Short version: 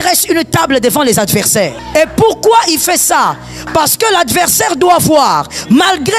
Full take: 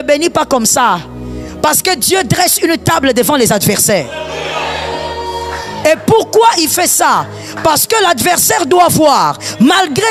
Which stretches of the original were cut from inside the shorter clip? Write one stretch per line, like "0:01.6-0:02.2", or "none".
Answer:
0:04.1-0:05.7